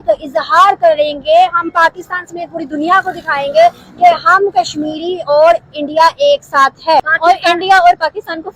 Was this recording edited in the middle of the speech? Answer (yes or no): yes